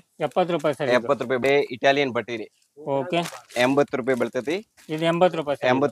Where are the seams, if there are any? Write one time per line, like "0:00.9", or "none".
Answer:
0:01.4